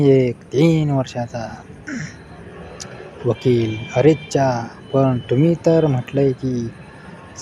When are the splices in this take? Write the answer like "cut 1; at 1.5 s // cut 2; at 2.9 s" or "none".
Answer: none